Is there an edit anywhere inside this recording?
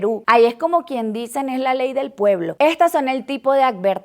yes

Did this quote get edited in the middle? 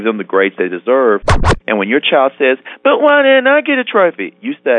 yes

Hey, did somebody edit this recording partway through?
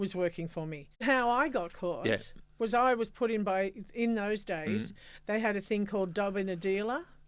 yes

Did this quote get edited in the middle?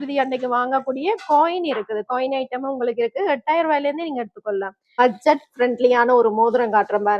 yes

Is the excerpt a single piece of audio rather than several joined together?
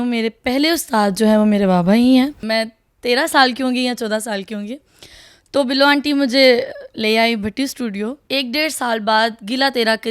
no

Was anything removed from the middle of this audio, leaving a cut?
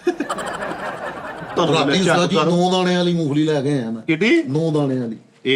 yes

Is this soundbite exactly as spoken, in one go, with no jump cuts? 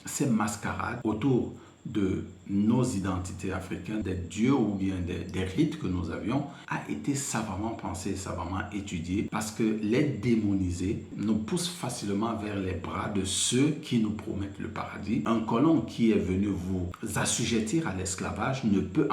no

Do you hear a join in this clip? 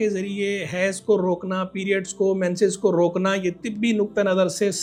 no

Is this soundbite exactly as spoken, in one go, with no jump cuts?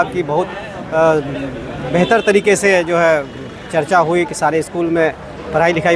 yes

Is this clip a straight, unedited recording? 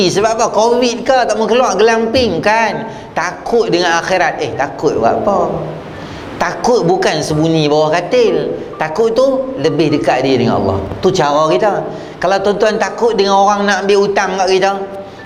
yes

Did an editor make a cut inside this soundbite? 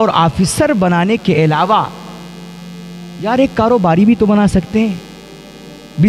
no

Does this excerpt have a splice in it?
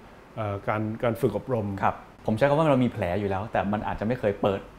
yes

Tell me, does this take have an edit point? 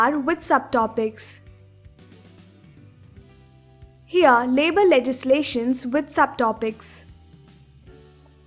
no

